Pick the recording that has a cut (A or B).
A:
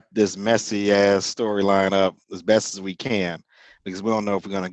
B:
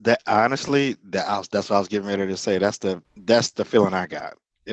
B